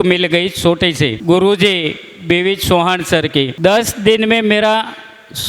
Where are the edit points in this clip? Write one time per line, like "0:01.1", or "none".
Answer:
0:01.2
0:03.5